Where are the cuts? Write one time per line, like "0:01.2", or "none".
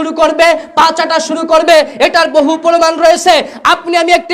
none